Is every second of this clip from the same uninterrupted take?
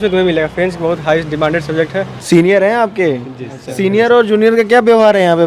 no; 1 cut; at 2.1 s

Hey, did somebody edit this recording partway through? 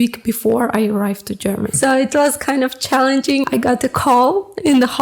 yes; 2 cuts; at 1.7 s, 3.4 s

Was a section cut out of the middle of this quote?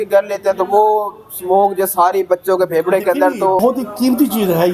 yes; 1 cut; at 3.6 s

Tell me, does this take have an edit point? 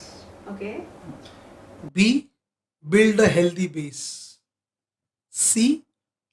no; 0 cuts

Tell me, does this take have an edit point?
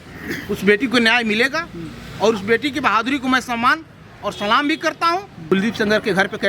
yes; 1 cut; at 5.5 s

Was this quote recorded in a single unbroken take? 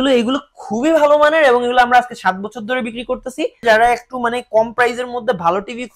no; 1 cut; at 3.6 s

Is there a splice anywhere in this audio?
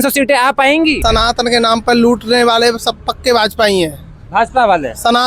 yes; 1 cut; at 1.0 s

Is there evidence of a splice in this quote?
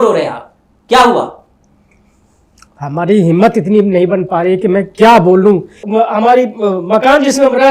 yes; 1 cut; at 5.7 s

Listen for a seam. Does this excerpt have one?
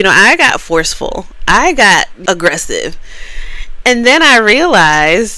yes; 1 cut; at 2.1 s

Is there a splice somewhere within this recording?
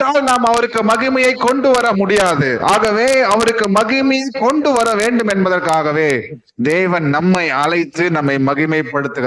no; 0 cuts

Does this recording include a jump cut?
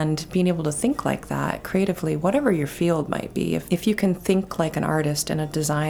yes; 1 cut; at 3.6 s

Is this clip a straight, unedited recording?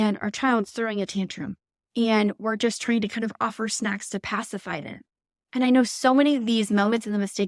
yes; 0 cuts

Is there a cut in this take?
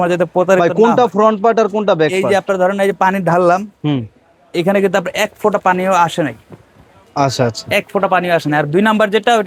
no; 0 cuts

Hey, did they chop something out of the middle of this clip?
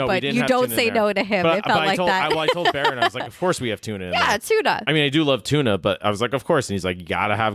no; 0 cuts

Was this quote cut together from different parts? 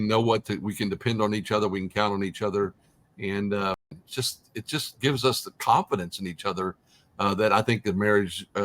yes; 1 cut; at 3.9 s

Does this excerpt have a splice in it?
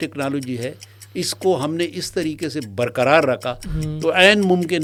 no; 0 cuts

